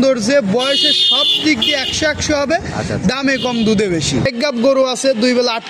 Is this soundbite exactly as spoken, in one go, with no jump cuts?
no; 1 cut; at 4.3 s

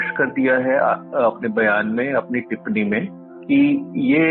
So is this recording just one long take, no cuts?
yes; 0 cuts

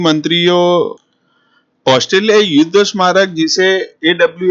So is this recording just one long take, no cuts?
no; 1 cut; at 0.9 s

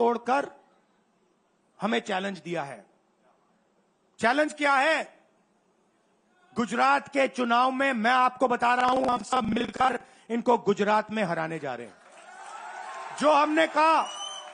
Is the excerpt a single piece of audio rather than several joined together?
yes; 0 cuts

